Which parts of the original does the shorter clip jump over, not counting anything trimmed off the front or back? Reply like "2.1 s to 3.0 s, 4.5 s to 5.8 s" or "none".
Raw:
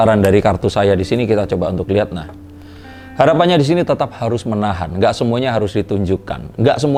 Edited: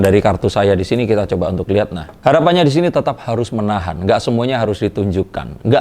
2.2 s to 3.0 s